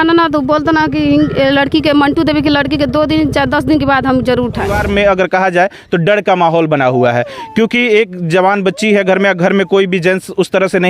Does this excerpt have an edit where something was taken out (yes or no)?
yes